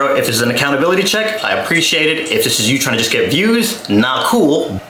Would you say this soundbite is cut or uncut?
uncut